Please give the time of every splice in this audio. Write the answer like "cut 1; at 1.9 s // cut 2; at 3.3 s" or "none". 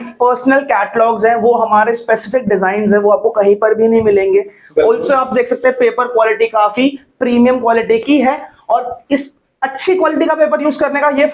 none